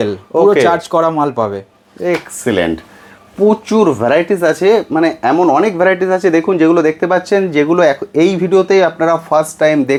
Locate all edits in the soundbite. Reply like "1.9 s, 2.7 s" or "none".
none